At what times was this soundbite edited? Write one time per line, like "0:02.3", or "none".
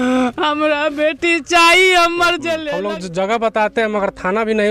0:02.6

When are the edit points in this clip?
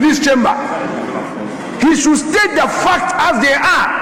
none

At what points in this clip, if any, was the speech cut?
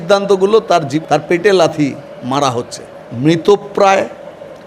0:01.0
0:03.0

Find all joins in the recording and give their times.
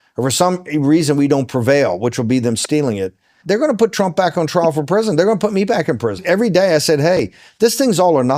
0:02.2
0:03.2

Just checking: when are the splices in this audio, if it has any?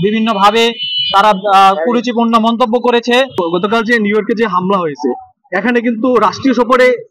0:03.4

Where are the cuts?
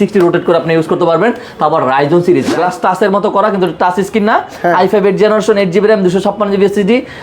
0:02.5

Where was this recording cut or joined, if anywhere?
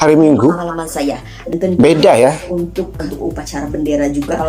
0:01.5

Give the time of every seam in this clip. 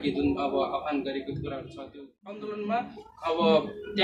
0:02.4

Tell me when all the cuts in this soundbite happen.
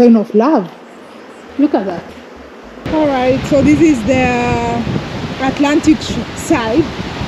0:02.7

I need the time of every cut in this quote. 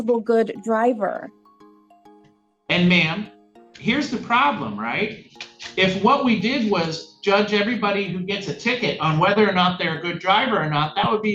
none

